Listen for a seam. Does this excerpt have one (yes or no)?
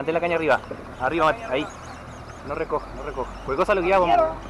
no